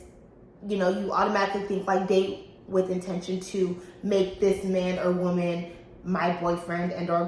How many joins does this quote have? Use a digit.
0